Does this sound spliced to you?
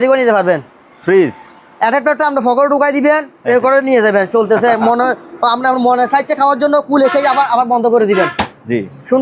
no; 0 cuts

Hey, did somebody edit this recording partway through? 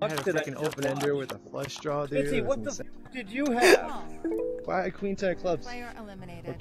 no; 0 cuts

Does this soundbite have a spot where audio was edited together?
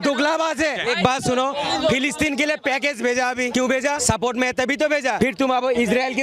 yes; 3 cuts; at 0.8 s, 3.7 s, 5.5 s

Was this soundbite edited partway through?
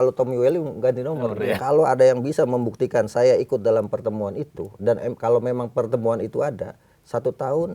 yes; 1 cut; at 1.6 s

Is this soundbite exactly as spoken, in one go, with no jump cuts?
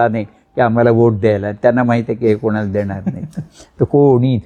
yes; 0 cuts

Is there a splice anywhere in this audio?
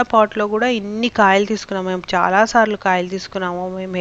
no; 0 cuts

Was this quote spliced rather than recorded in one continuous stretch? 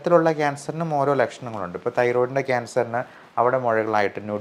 no; 0 cuts

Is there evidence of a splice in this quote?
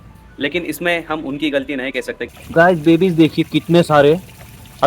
yes; 1 cut; at 2.2 s

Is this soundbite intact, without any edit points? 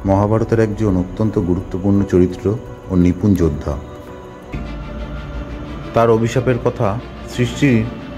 no; 1 cut; at 4.5 s

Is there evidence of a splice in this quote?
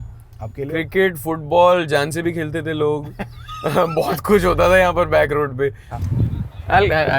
yes; 1 cut; at 5.8 s

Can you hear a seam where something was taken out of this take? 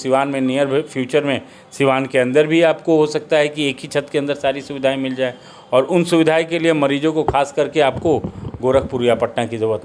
no; 0 cuts

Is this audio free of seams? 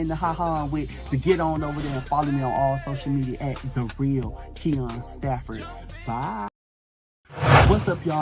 no; 1 cut; at 6.9 s

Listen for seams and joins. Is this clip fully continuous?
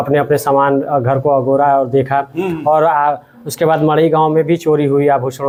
yes; 0 cuts

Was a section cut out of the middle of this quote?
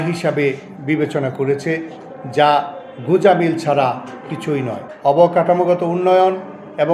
yes; 1 cut; at 4.8 s

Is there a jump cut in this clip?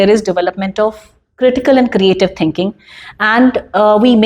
no; 0 cuts

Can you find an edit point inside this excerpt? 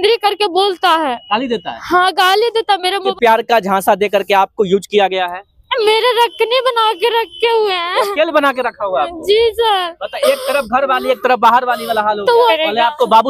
yes; 2 cuts; at 3.1 s, 12.5 s

